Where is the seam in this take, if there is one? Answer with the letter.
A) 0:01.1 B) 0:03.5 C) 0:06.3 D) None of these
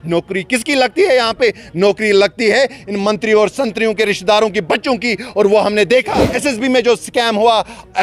C